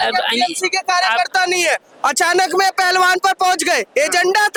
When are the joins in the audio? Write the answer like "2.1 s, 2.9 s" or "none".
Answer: none